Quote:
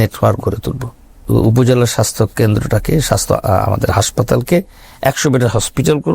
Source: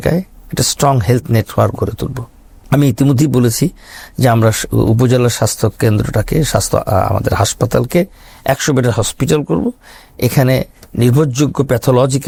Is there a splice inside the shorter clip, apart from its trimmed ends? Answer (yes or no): yes